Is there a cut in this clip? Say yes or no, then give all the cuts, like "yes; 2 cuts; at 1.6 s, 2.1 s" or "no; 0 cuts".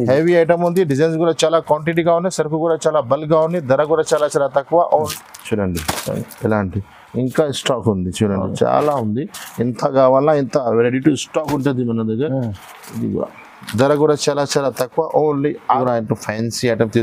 yes; 2 cuts; at 5.1 s, 15.8 s